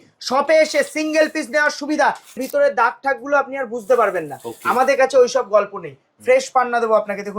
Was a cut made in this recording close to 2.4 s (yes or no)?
yes